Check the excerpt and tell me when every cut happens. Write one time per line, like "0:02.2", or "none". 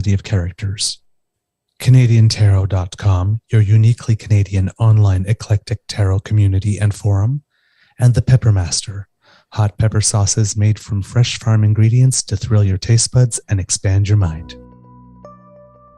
0:14.4